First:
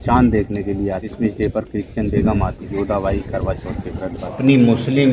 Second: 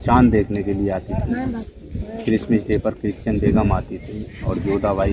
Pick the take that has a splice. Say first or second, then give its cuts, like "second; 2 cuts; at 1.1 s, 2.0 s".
first; 3 cuts; at 1.1 s, 2.6 s, 4.3 s